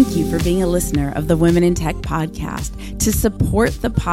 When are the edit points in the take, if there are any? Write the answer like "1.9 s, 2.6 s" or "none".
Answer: none